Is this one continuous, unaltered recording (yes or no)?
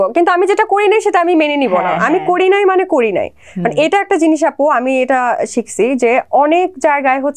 yes